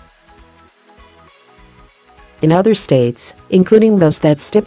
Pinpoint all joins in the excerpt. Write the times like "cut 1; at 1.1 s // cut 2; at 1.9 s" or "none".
cut 1; at 2.4 s